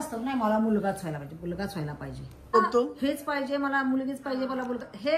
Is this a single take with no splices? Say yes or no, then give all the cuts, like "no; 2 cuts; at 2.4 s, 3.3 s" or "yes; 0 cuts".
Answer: no; 1 cut; at 2.5 s